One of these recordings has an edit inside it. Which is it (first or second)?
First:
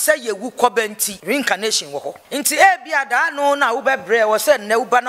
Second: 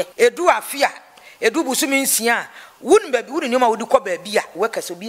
first